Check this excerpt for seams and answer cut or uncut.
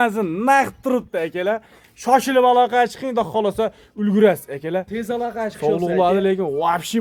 uncut